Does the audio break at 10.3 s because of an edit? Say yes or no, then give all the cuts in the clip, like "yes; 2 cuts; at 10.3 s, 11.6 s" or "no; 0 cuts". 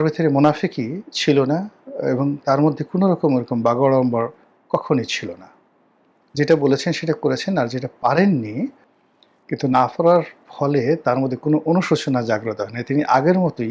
no; 1 cut; at 8.9 s